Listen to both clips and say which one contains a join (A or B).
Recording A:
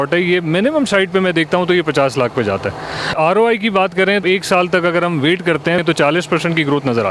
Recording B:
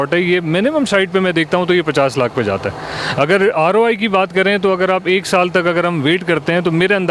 A